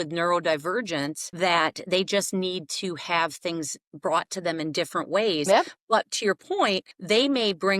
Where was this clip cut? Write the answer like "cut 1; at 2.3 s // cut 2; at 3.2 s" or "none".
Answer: cut 1; at 1.2 s // cut 2; at 6.9 s